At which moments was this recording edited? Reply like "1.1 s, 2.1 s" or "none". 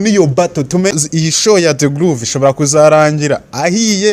1.0 s